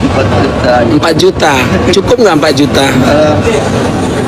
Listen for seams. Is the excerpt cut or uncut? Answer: uncut